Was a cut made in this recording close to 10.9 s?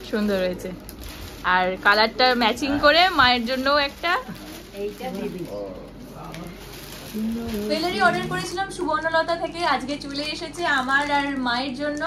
no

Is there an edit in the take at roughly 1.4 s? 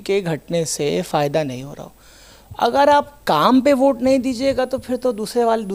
no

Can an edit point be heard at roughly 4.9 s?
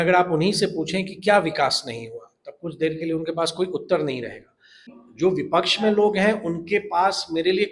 yes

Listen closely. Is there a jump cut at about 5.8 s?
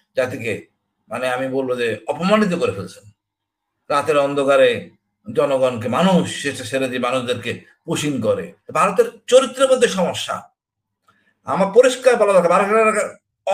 no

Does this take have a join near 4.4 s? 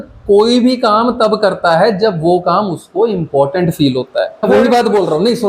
yes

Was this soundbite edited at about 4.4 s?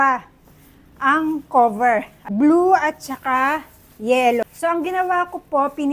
yes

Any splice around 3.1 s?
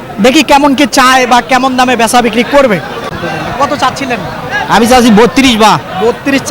yes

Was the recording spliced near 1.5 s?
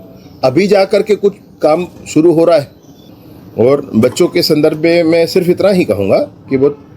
no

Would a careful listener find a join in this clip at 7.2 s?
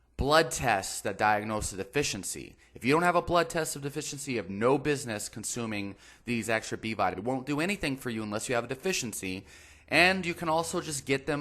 yes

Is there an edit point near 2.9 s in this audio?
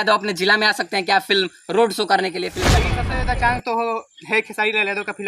yes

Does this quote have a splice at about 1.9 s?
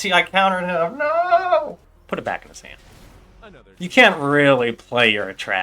yes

